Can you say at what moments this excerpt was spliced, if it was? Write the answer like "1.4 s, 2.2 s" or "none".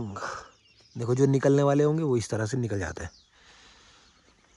none